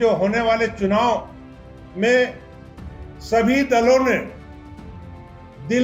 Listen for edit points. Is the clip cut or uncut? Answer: uncut